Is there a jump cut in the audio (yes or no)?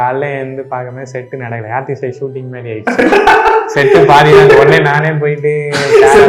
no